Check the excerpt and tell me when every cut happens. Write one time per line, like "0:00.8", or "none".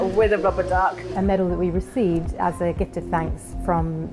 0:01.1

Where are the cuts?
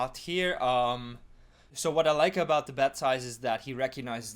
0:01.7

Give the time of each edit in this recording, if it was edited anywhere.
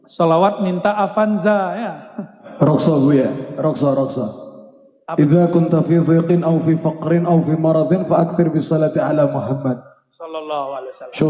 0:02.4

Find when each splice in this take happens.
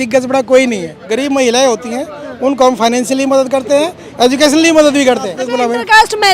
0:01.0
0:05.4

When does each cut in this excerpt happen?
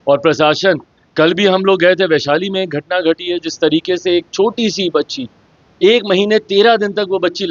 none

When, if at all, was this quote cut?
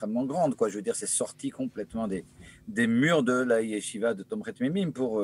none

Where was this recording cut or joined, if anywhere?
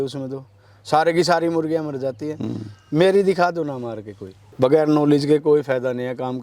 0:04.3

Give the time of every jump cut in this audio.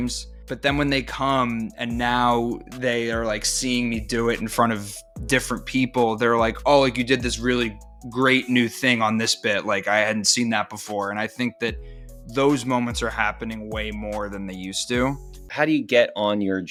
none

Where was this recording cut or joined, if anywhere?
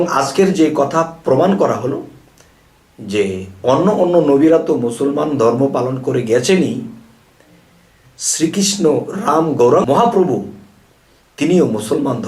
0:09.8

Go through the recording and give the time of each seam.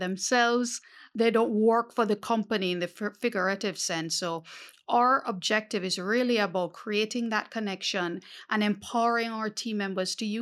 0:01.0

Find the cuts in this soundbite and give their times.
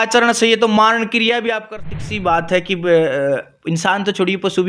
0:01.9

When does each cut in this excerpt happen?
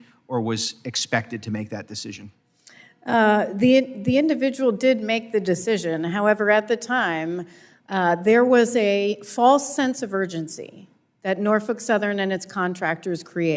none

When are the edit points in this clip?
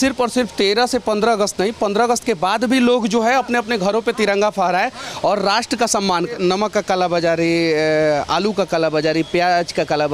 0:06.4

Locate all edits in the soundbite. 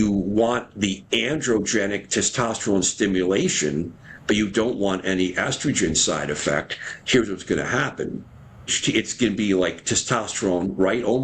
0:08.8

